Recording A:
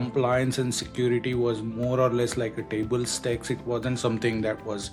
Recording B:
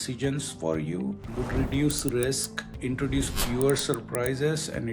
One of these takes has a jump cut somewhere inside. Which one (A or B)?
B